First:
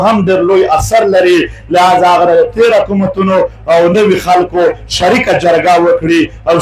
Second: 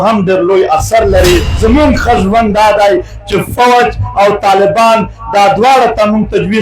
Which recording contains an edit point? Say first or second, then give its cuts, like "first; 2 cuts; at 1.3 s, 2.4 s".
second; 1 cut; at 1.5 s